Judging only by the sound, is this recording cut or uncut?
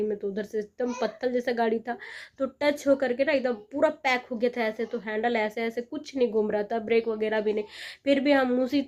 uncut